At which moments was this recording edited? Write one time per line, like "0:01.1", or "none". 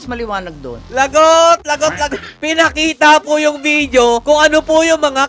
0:02.3
0:04.2